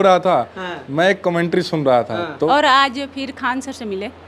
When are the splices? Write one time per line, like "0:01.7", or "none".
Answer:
0:02.5